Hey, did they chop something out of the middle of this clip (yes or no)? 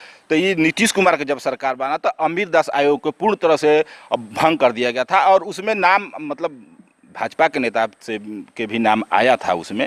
no